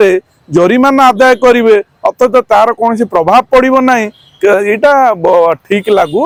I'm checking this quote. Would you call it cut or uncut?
uncut